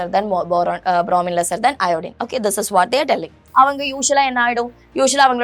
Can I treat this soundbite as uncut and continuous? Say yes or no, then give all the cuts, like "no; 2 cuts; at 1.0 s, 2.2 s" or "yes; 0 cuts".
no; 1 cut; at 3.4 s